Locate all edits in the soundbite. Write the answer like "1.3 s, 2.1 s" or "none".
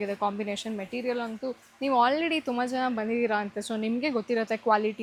none